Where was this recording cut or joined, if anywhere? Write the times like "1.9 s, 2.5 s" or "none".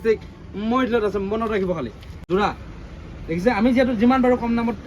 2.2 s